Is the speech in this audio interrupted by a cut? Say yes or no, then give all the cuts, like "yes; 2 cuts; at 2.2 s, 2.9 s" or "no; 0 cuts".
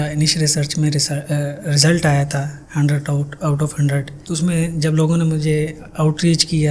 no; 0 cuts